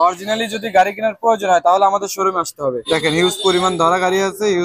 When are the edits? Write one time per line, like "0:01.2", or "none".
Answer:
0:02.8